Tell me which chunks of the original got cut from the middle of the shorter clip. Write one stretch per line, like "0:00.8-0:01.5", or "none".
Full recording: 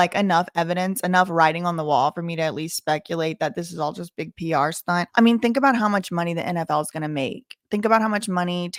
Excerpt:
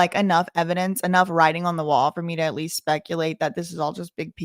none